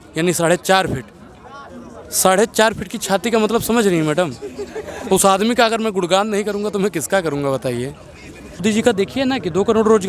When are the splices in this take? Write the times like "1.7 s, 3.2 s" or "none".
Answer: 8.6 s